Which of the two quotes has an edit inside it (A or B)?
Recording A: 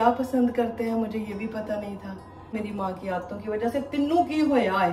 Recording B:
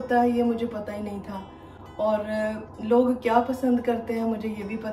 A